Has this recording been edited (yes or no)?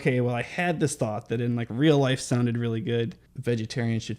yes